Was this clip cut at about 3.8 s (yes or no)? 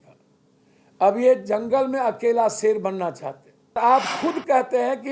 yes